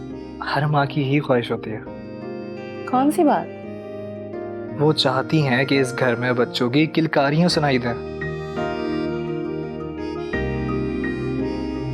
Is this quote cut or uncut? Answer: uncut